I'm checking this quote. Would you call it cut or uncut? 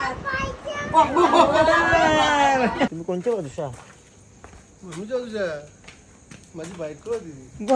cut